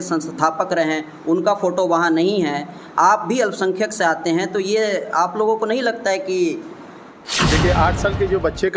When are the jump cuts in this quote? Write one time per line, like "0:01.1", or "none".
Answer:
0:07.4